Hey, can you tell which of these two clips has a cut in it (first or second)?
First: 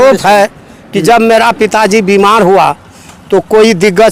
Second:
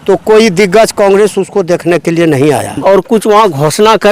second